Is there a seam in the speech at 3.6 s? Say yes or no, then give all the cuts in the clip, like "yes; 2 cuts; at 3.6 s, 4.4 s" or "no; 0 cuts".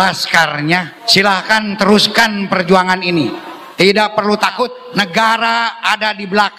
no; 2 cuts; at 1.0 s, 4.8 s